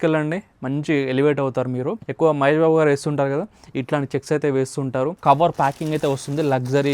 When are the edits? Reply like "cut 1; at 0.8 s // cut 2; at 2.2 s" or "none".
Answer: cut 1; at 2.0 s // cut 2; at 5.1 s